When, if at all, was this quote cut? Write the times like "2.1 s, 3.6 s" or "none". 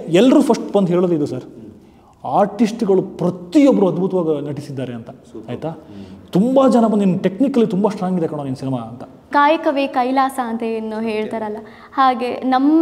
9.3 s